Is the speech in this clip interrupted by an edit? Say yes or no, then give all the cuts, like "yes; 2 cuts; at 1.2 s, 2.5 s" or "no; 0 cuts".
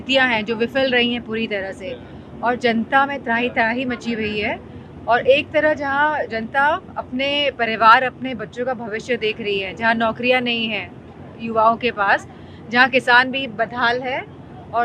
no; 0 cuts